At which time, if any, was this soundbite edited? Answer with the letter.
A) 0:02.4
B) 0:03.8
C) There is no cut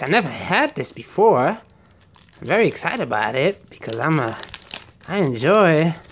C